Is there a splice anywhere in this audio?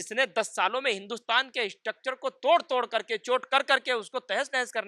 no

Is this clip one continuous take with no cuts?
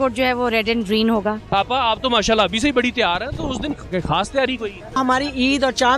no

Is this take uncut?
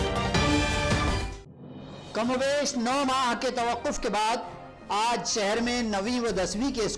no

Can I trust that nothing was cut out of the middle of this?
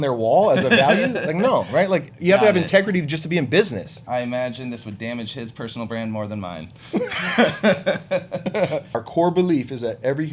no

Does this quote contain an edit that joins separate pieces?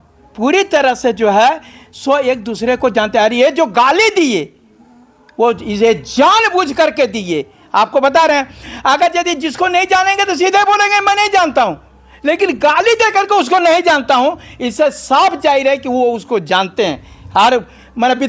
no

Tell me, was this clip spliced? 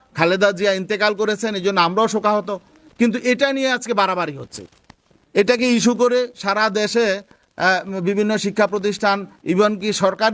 no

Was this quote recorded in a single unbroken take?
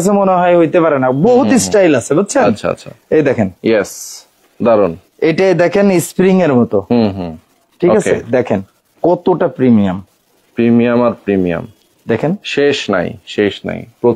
yes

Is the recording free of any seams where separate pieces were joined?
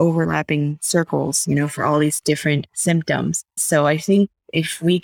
no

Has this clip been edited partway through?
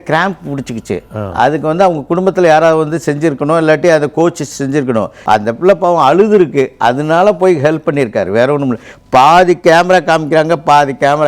yes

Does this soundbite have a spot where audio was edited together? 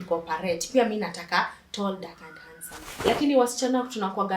yes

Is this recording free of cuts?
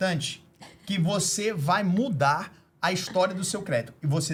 yes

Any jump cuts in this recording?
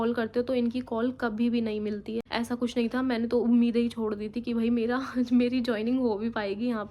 yes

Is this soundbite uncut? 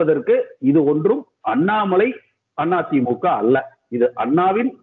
yes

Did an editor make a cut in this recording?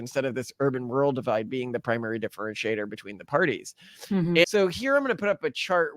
yes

